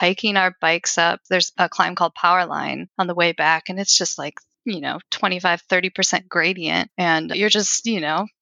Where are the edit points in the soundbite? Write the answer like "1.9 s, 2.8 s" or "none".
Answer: 1.3 s, 2.8 s, 4.5 s, 7.3 s